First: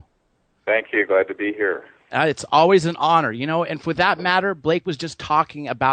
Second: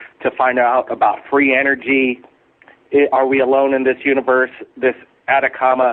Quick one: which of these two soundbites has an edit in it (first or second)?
second